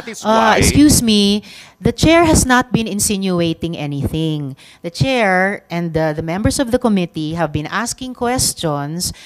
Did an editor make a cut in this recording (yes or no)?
no